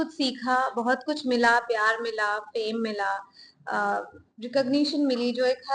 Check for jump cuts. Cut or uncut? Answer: uncut